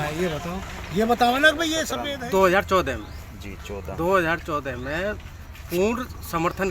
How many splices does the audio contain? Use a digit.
1